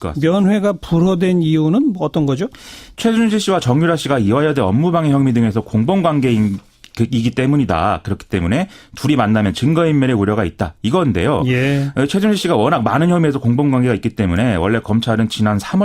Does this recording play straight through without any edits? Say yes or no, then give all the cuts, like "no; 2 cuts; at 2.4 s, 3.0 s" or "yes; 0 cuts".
no; 1 cut; at 4.0 s